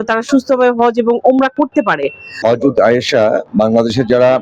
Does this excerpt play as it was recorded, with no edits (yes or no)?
no